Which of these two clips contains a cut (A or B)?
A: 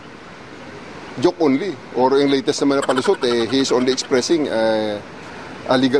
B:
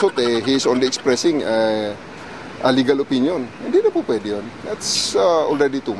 A